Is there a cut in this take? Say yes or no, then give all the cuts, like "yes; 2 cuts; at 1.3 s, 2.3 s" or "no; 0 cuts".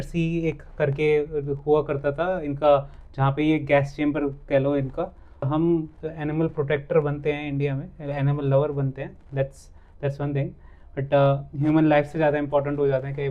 yes; 1 cut; at 5.5 s